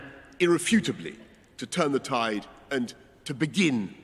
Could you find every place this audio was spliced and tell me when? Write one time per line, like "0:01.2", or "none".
0:02.5

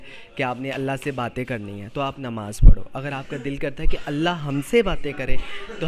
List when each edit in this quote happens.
none

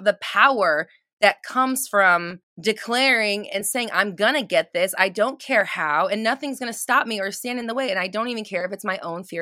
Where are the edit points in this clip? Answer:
0:02.4

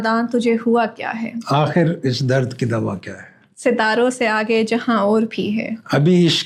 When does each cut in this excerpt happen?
none

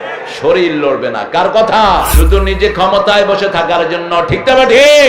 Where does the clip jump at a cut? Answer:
0:02.1

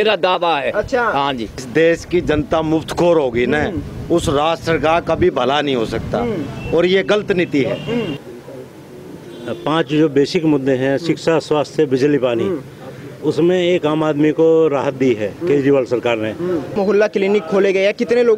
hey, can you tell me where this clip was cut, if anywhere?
0:01.5
0:08.3
0:16.7

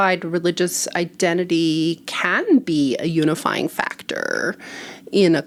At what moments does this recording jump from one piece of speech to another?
none

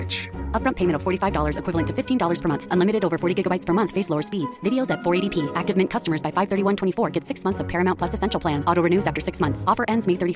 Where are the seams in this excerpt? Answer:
none

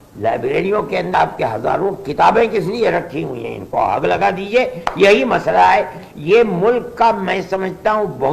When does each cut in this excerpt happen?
0:01.1

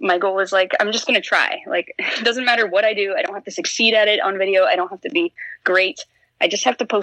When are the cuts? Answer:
none

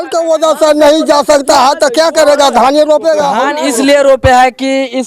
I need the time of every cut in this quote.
0:03.4

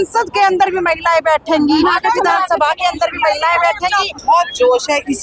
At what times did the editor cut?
0:04.2

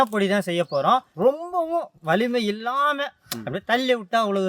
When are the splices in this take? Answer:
0:01.1

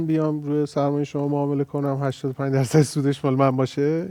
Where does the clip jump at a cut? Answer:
none

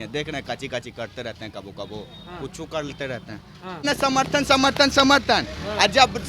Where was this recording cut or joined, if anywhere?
0:03.8

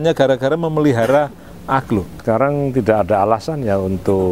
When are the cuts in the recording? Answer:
0:02.1

